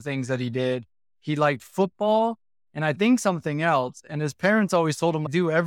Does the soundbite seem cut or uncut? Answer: uncut